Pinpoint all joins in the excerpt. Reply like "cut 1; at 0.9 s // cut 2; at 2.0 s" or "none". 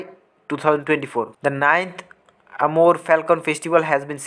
cut 1; at 1.3 s